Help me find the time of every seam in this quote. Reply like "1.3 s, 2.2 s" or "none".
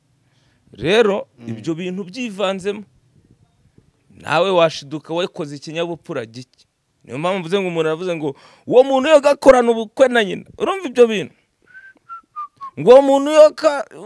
none